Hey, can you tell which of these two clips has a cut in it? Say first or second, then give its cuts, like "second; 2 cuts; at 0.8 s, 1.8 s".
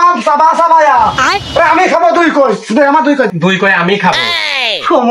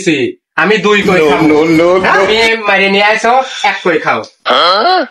first; 1 cut; at 3.3 s